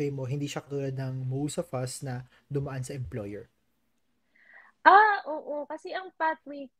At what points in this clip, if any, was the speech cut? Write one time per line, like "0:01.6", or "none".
none